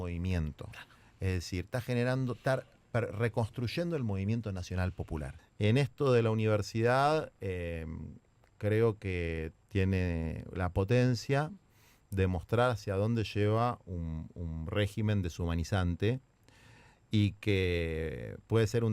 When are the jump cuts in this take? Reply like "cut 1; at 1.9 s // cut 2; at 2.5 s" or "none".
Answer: cut 1; at 5.4 s // cut 2; at 9.6 s